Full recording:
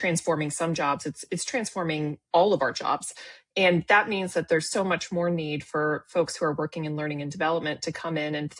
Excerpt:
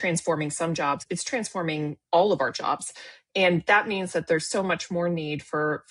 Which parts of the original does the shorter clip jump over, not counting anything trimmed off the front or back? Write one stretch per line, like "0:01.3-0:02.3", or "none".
0:01.0-0:01.2